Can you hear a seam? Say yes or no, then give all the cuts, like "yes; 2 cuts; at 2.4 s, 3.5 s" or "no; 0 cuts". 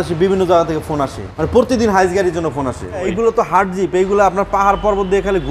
yes; 2 cuts; at 1.3 s, 3.1 s